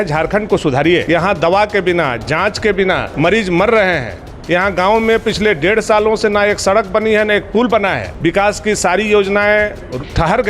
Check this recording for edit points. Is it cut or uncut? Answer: cut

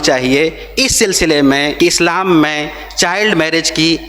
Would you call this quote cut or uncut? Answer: cut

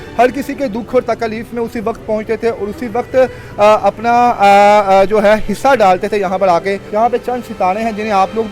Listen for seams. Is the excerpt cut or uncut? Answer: cut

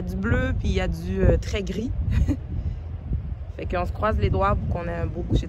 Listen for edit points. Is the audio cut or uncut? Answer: uncut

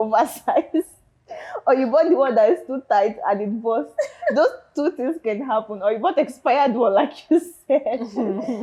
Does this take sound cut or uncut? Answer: uncut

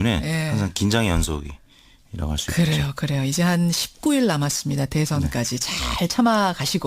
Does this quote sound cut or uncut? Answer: cut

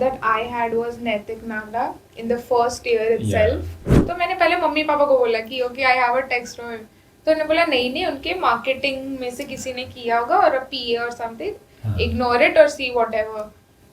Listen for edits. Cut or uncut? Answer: cut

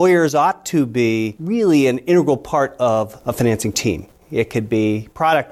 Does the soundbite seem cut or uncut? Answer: cut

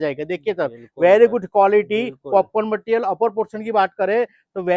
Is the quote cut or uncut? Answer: uncut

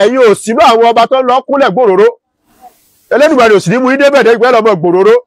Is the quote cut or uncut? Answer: uncut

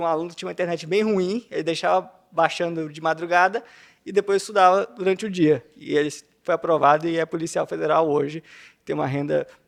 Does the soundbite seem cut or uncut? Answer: uncut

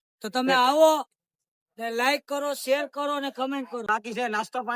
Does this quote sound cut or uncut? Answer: cut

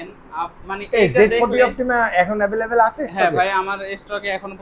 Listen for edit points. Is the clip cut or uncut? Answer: uncut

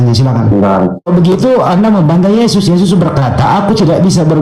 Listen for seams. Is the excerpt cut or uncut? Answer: cut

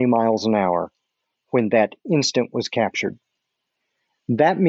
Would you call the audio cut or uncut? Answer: uncut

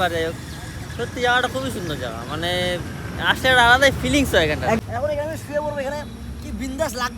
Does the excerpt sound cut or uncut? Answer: cut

